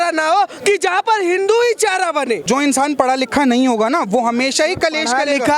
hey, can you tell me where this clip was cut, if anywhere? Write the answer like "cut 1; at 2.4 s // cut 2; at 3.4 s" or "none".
cut 1; at 2.4 s